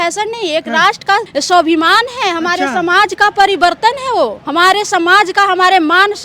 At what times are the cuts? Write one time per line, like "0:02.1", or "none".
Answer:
0:01.3
0:04.4